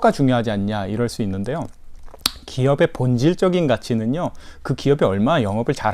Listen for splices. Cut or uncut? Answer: uncut